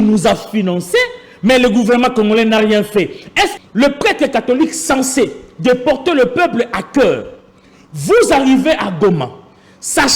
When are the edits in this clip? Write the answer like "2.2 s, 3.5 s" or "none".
3.5 s

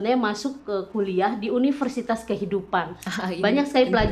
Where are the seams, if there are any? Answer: none

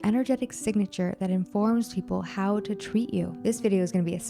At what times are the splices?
3.3 s

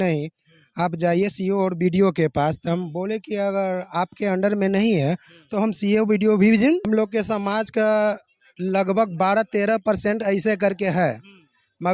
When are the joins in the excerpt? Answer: 6.8 s

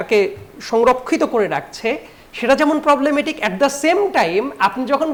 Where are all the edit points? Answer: none

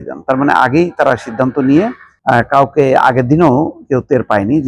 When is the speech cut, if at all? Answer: 2.1 s

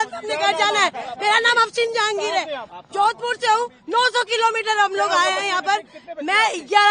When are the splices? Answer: none

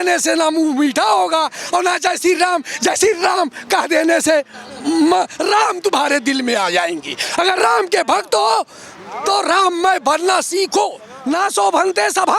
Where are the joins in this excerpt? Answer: 11.1 s

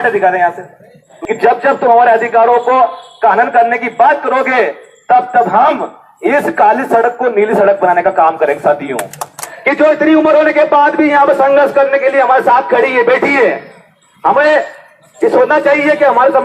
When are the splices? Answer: 1.1 s, 9.5 s

